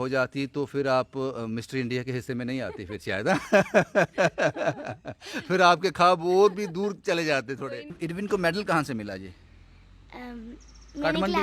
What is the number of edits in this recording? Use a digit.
1